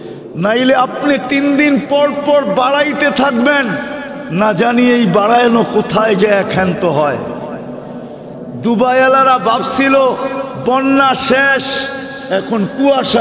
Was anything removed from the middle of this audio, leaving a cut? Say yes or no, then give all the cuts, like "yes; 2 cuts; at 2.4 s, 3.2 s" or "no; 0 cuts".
no; 0 cuts